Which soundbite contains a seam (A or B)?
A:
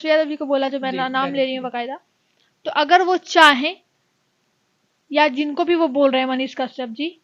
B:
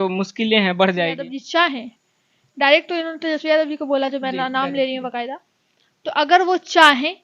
B